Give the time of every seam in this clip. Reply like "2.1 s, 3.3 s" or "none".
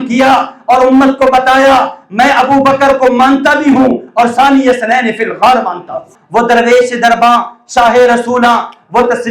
6.1 s